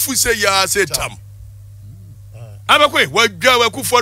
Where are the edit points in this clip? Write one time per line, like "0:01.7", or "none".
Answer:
none